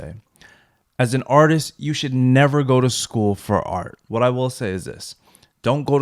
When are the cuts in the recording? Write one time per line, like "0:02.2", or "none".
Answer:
0:04.0